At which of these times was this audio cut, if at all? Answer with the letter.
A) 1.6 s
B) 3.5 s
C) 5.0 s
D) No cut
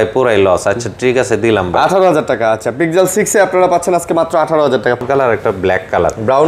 C